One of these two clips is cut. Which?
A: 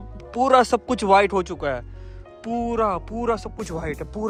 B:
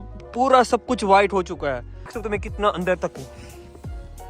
B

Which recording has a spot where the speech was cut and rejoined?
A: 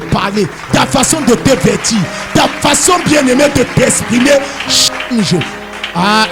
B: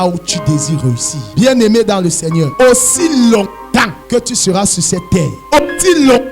B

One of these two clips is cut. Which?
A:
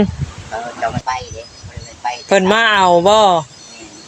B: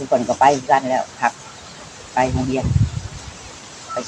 A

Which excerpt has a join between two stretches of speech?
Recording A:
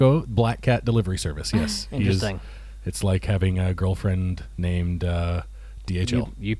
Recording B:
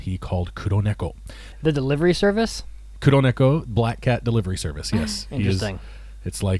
B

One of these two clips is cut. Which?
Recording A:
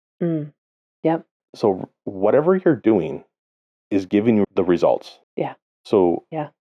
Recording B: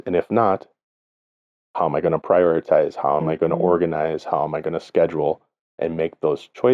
A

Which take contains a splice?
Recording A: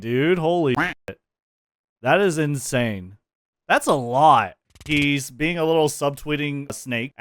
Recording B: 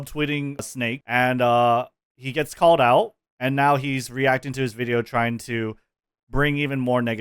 A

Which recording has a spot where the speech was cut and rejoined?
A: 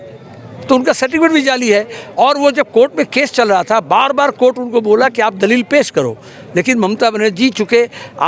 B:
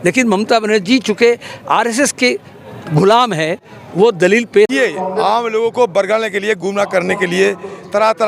B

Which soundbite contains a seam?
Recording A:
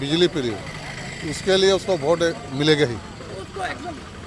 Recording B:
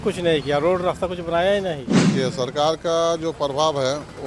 B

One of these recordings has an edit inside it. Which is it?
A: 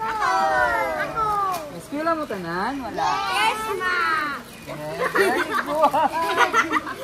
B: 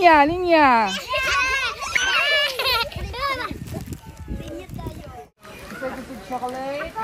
B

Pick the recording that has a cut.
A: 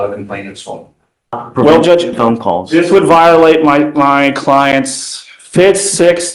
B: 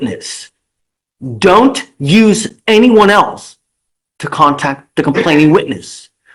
A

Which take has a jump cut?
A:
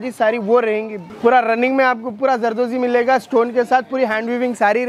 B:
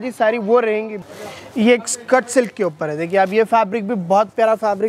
B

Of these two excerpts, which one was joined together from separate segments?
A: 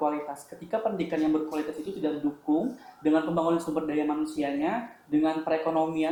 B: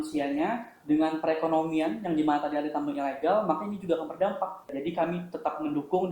B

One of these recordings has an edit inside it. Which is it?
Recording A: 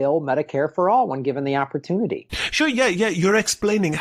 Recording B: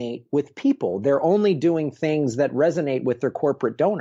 A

